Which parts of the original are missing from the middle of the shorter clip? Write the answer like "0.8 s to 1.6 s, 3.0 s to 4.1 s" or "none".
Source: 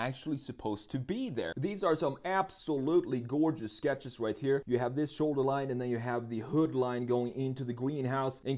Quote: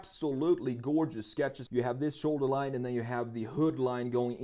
4.1 s to 4.6 s